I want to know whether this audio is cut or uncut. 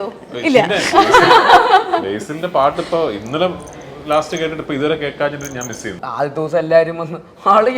cut